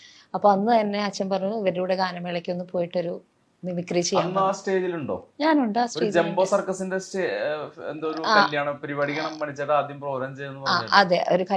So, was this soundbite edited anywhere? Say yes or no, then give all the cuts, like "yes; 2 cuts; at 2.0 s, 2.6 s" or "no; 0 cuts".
no; 0 cuts